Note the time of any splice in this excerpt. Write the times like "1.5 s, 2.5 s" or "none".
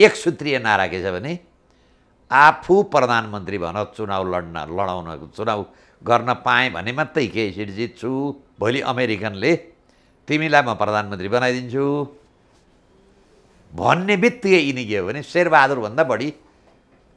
8.4 s

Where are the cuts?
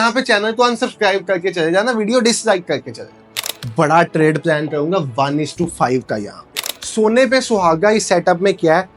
3.5 s, 6.8 s

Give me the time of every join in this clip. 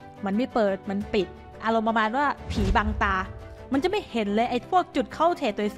1.5 s

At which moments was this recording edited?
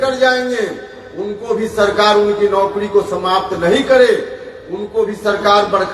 none

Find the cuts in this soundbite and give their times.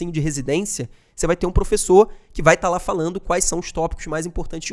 none

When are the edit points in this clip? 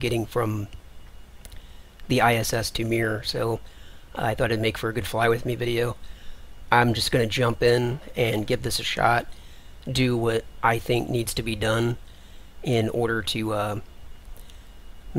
none

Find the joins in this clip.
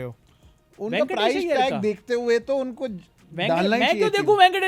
none

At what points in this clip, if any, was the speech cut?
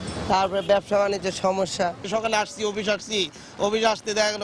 2.0 s

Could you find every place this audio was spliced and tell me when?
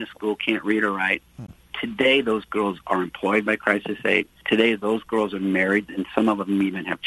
4.3 s

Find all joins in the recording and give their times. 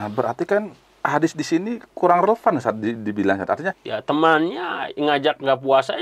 3.8 s

